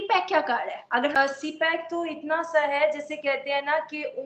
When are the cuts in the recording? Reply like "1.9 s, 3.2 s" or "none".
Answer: 1.2 s